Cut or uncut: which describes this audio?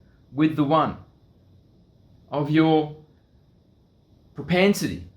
uncut